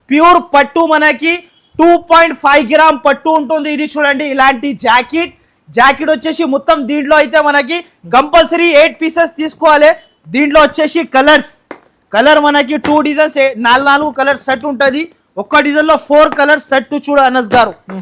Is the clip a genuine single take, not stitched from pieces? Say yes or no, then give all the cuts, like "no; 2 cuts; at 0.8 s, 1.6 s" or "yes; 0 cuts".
yes; 0 cuts